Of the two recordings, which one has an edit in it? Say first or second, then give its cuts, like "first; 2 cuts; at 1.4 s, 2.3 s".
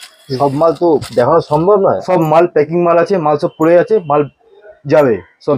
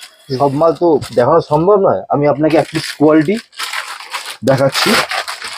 first; 1 cut; at 2.0 s